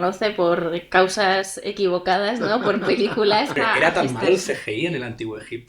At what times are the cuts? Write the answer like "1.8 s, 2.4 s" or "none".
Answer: 3.5 s